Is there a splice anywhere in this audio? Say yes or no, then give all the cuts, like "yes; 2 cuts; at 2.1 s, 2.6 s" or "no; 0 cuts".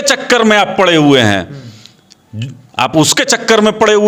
no; 0 cuts